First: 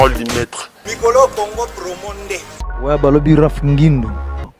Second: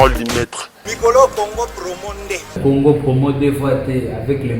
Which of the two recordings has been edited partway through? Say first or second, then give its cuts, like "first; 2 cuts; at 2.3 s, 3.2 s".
second; 1 cut; at 2.4 s